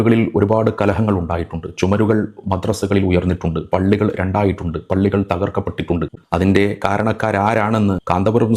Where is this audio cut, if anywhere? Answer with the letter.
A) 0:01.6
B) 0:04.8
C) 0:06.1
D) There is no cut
C